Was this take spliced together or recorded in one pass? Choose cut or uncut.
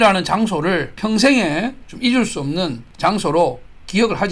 cut